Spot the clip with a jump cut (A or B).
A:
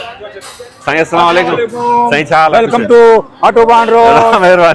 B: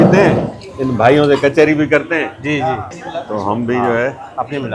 B